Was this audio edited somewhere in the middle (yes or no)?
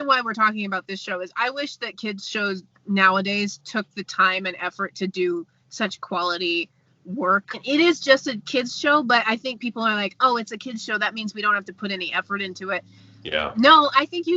yes